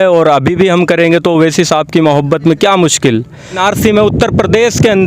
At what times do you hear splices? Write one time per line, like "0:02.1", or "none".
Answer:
0:03.6